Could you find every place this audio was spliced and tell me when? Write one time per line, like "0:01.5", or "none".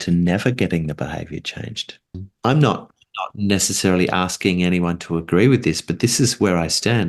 0:02.2